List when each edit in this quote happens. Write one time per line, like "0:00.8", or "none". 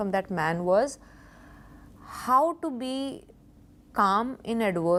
none